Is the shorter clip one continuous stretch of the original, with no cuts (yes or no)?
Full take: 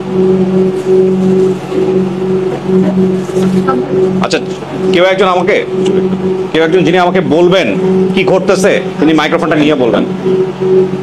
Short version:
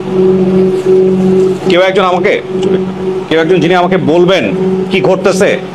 no